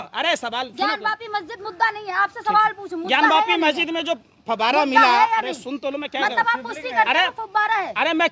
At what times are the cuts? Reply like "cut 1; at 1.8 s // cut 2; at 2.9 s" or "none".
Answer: none